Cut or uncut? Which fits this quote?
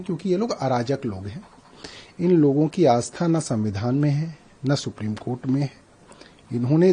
uncut